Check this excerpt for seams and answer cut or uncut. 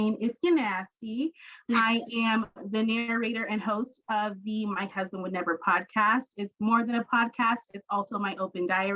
uncut